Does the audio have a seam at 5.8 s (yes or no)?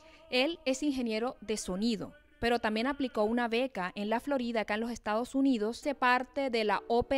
no